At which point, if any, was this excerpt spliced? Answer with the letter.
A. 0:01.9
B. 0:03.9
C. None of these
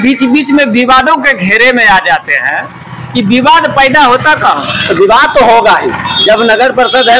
C